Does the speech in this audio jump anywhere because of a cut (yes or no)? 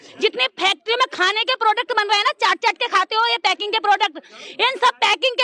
no